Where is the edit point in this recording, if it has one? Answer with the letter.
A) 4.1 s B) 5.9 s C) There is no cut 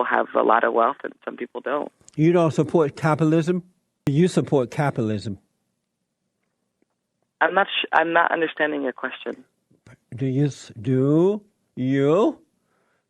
A